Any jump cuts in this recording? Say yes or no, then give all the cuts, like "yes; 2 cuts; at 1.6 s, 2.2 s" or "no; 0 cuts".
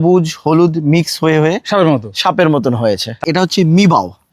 yes; 1 cut; at 3.2 s